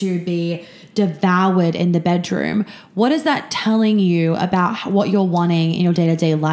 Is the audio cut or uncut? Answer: uncut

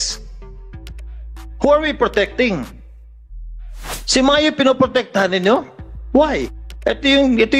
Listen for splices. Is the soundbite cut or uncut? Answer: cut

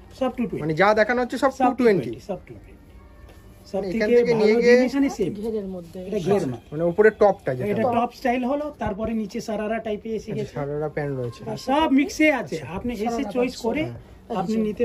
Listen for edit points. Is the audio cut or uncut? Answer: cut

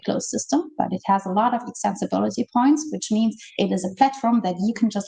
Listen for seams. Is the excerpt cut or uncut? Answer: uncut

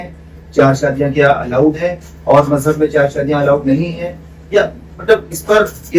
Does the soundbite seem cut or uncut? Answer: uncut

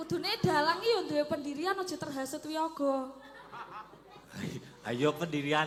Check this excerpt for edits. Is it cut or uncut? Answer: uncut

